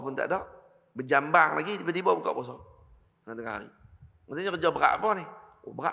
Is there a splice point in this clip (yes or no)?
no